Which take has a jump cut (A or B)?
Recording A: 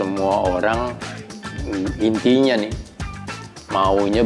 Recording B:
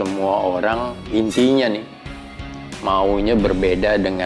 B